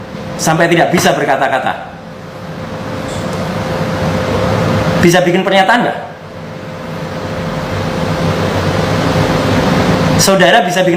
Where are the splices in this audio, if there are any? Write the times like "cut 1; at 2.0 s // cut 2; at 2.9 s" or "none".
none